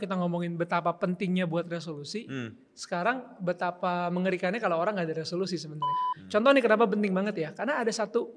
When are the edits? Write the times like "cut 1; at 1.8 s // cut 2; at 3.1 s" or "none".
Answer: cut 1; at 6.0 s